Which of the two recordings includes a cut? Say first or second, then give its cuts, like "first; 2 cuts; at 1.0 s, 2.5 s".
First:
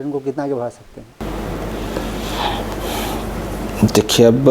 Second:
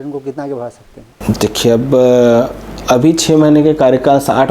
second; 1 cut; at 1.2 s